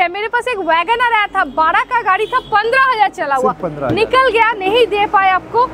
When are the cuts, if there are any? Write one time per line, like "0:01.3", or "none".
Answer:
none